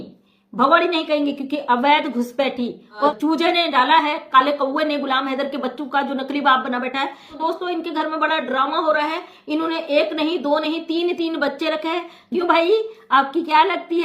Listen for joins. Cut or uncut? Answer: cut